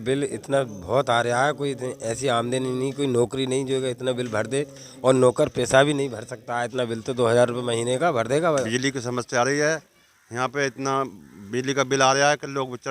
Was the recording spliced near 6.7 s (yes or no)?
no